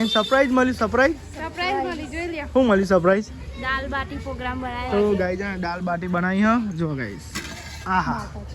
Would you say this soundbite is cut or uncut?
uncut